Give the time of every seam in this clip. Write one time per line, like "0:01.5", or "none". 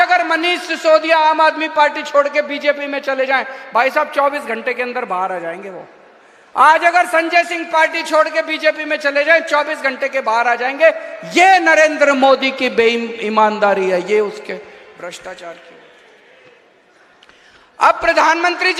none